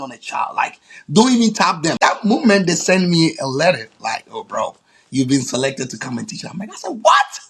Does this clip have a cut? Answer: yes; 1 cut; at 1.9 s

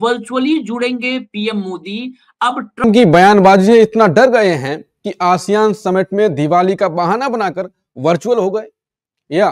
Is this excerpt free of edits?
no; 1 cut; at 2.8 s

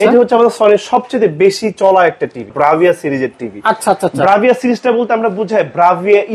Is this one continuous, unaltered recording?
no; 1 cut; at 2.5 s

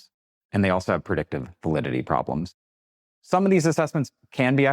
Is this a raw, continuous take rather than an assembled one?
no; 1 cut; at 2.5 s

